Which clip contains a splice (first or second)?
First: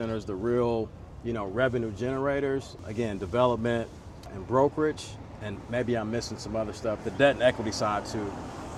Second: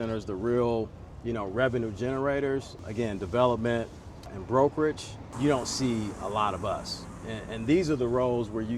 second